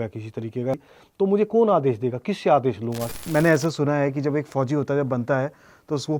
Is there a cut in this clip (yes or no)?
yes